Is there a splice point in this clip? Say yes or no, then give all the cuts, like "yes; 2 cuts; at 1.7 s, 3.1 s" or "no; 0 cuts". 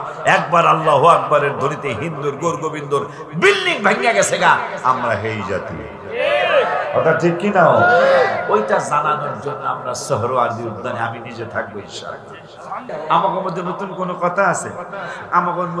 yes; 1 cut; at 12.9 s